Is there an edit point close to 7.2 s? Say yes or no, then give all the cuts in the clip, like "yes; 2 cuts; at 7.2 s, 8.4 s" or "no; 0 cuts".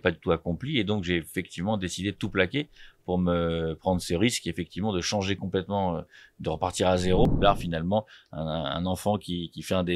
yes; 1 cut; at 7.2 s